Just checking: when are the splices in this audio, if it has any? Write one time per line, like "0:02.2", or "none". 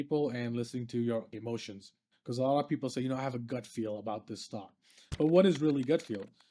0:01.7